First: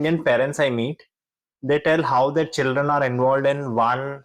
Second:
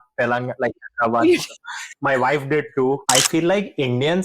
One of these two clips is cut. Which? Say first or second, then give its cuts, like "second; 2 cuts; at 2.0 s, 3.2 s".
second; 1 cut; at 3.0 s